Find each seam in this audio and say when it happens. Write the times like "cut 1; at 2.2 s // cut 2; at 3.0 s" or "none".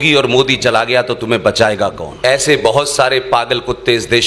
cut 1; at 2.1 s